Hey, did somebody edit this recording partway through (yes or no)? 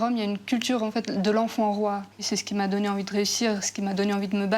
yes